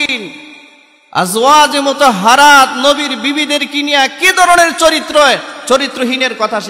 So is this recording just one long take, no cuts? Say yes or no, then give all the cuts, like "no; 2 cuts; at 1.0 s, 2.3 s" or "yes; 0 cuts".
yes; 0 cuts